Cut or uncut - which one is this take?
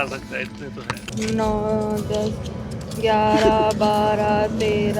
cut